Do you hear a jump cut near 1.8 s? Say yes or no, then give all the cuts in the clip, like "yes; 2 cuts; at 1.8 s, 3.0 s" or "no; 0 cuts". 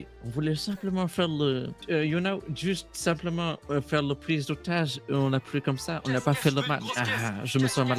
yes; 2 cuts; at 1.8 s, 6.9 s